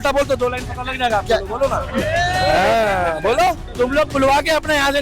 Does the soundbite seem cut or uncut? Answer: cut